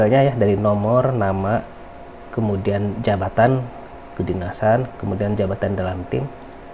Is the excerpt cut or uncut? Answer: uncut